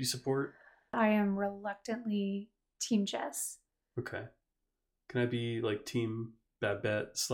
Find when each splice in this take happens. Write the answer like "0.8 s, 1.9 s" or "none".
0.9 s